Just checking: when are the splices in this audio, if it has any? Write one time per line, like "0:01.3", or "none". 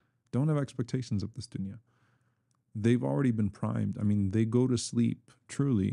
none